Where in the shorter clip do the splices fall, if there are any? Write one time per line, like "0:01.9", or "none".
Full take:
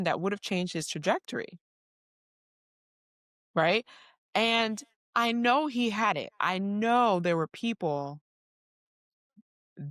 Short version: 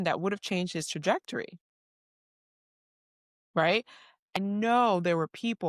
0:04.3